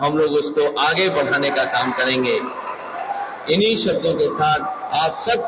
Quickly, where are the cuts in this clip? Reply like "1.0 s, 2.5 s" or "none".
none